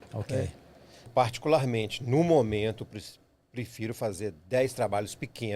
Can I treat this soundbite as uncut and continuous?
no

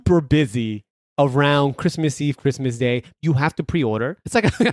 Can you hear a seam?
yes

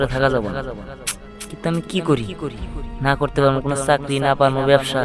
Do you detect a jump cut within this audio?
no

